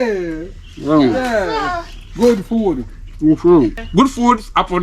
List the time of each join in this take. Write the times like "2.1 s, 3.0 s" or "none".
3.8 s